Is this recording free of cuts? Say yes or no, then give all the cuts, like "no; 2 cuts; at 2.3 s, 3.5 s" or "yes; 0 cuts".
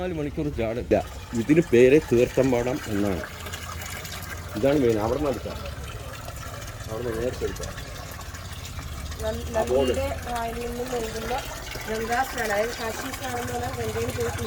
yes; 0 cuts